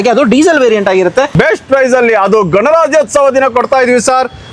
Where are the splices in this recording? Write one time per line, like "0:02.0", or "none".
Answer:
0:01.3